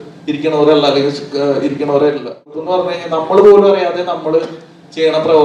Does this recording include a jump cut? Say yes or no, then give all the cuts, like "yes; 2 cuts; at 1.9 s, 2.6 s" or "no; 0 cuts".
yes; 1 cut; at 2.6 s